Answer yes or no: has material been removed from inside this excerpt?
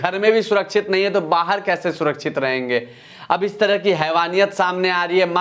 no